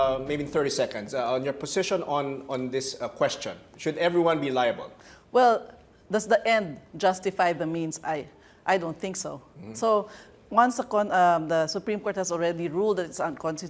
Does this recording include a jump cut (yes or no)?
yes